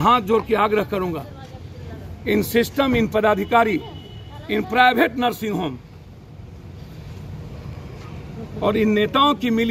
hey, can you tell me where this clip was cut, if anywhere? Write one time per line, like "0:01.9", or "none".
none